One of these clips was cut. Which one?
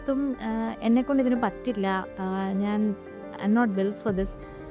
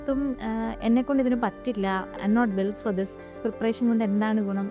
second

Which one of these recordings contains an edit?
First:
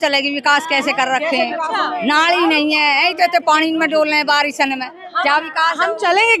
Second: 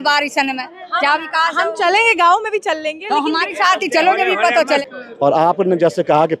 second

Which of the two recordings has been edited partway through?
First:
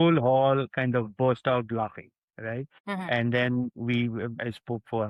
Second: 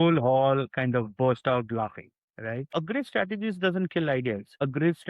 second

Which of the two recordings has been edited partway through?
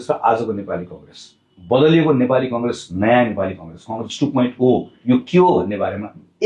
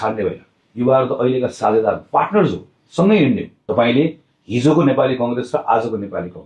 second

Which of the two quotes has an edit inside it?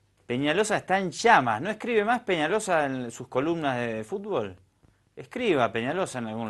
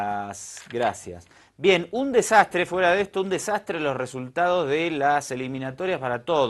second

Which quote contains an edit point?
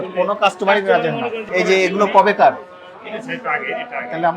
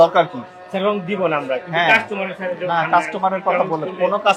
first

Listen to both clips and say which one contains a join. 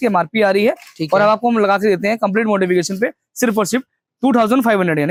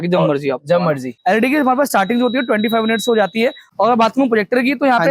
second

